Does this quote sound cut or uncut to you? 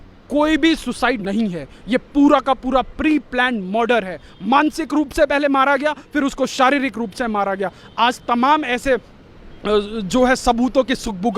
cut